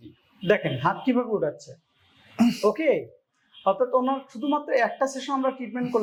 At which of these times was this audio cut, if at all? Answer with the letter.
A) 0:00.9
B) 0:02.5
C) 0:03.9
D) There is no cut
D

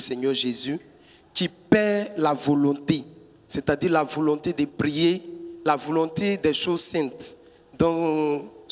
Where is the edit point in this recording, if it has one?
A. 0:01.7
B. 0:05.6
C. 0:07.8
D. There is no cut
D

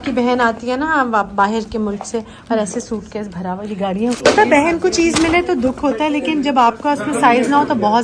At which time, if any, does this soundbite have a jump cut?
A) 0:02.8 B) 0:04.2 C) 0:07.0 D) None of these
B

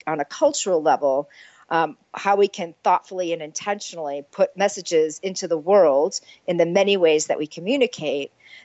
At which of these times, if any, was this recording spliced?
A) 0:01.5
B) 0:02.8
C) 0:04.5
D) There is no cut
C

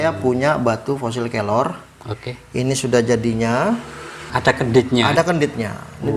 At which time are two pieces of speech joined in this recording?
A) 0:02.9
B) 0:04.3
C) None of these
B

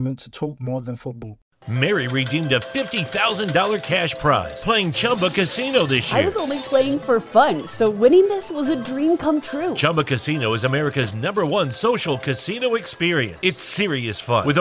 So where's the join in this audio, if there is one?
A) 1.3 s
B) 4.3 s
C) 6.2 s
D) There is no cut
A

